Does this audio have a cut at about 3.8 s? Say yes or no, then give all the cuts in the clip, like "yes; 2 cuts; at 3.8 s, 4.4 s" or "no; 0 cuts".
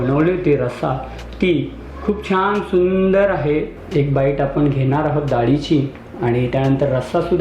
yes; 1 cut; at 3.8 s